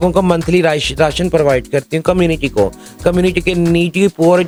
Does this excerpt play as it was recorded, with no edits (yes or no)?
yes